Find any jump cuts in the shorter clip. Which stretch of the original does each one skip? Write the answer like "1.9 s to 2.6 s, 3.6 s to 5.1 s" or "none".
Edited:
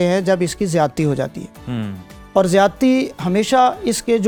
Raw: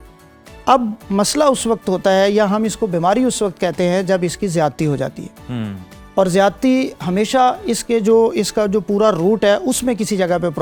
none